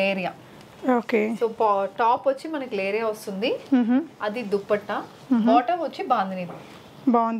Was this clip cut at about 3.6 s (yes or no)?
no